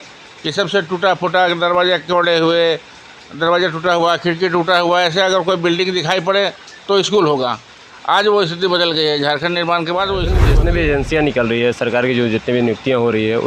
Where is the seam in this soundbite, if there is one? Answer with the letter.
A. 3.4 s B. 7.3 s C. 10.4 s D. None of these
C